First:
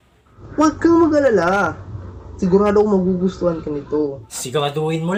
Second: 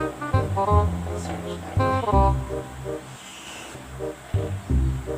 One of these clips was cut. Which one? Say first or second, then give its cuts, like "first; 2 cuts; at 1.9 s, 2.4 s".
second; 1 cut; at 0.9 s